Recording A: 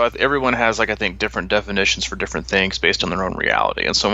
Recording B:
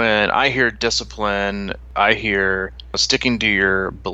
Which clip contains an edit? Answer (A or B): B